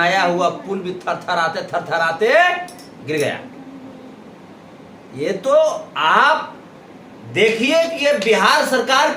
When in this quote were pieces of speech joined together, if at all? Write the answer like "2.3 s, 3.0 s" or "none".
none